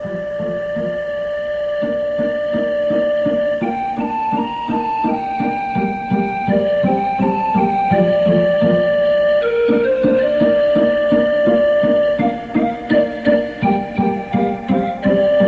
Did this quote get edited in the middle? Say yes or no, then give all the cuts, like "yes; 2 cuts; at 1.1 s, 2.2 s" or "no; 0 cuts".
no; 0 cuts